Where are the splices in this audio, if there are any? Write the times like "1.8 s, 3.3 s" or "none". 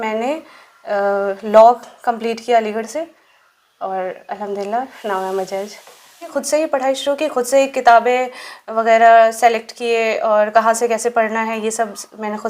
6.3 s